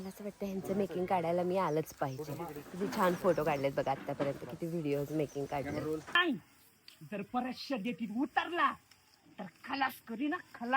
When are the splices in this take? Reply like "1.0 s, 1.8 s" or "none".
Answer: 6.2 s

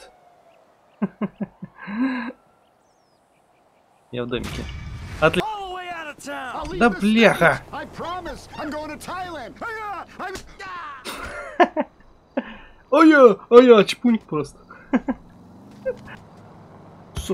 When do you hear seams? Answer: 5.4 s, 16.1 s

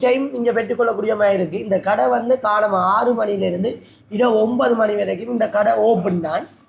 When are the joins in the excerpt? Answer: none

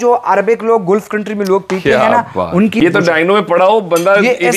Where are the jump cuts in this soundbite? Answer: 2.8 s

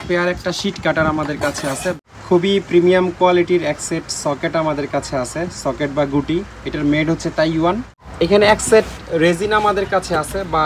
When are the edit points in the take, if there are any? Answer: 2.0 s, 8.0 s

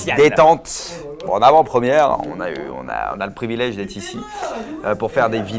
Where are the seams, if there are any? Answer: none

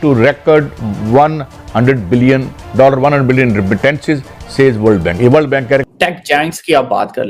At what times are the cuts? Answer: 5.8 s

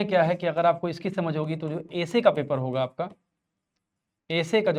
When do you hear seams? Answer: none

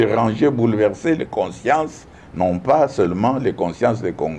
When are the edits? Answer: none

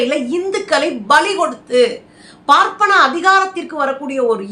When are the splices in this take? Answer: none

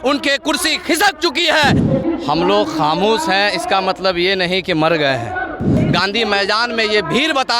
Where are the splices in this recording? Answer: 1.8 s, 5.8 s

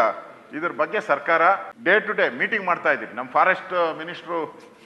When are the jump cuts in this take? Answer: 1.7 s

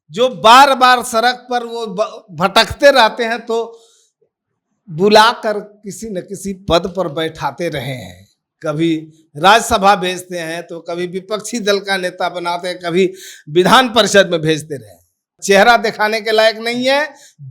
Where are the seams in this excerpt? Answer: 15.3 s

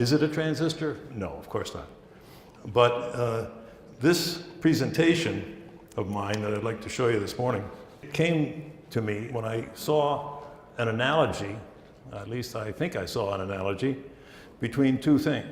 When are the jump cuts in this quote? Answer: 5.1 s

